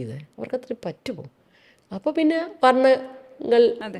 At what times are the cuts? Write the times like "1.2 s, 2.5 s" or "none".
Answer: none